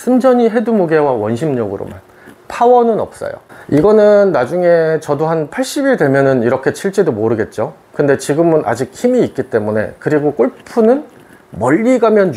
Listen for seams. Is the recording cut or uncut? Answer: cut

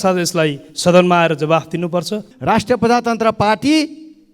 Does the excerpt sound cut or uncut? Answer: cut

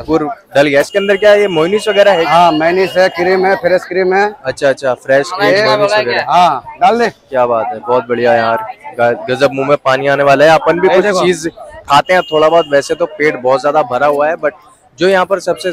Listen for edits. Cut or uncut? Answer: uncut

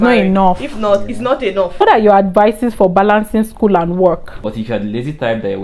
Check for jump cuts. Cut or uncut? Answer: cut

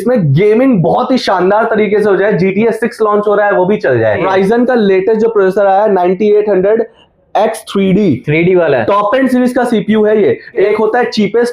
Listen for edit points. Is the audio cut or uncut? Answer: cut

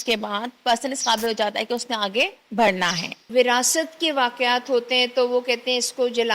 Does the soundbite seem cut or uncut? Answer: cut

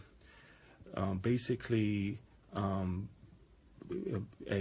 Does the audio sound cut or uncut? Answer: cut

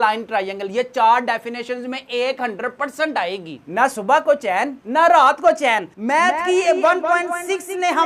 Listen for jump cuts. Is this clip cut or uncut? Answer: cut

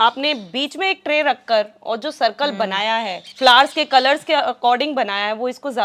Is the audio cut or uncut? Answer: cut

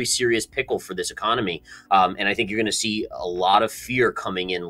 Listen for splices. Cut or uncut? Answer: uncut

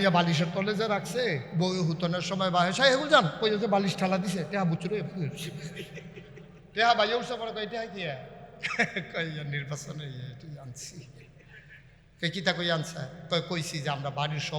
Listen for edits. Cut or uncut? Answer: cut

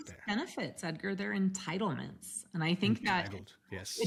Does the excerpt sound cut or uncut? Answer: uncut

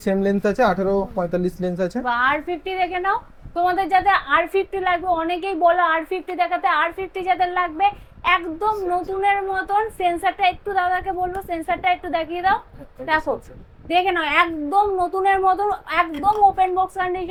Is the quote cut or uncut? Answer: uncut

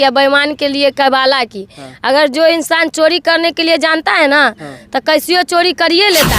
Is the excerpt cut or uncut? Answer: uncut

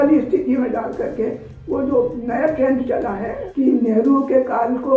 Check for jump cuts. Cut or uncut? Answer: cut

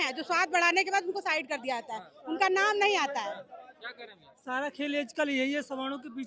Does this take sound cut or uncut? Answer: uncut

